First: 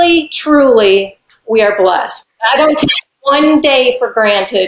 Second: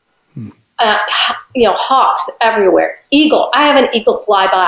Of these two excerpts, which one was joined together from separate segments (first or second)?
first